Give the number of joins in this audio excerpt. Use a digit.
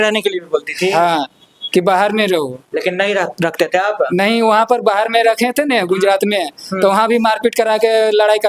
0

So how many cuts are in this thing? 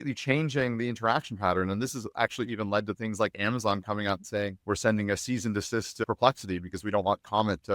0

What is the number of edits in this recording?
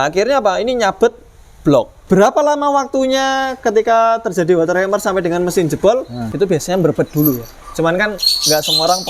2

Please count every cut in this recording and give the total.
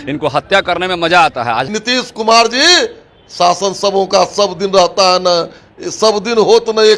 1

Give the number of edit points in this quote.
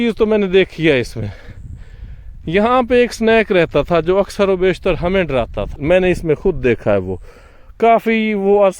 1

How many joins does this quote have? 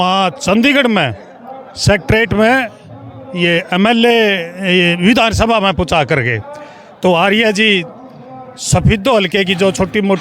0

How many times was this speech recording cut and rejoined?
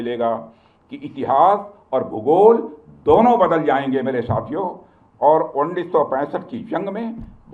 0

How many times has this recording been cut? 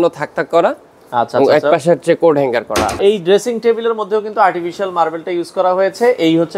1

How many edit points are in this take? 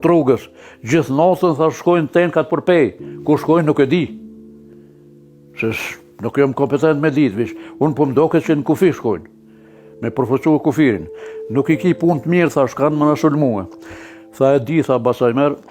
0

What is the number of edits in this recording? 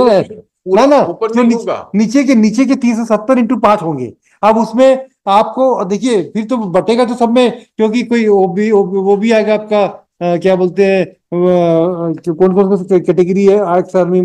0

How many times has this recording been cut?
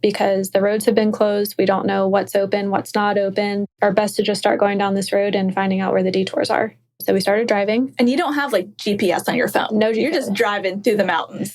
2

